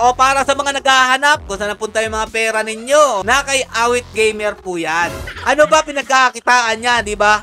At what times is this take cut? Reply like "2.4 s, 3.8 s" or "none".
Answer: 3.2 s, 5.3 s